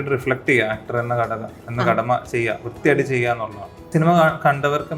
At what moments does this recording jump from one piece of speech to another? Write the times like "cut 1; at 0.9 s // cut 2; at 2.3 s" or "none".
cut 1; at 3.9 s